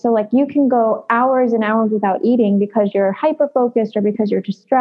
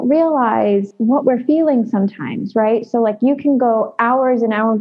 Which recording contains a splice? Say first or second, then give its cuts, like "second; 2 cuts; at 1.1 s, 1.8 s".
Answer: second; 1 cut; at 0.9 s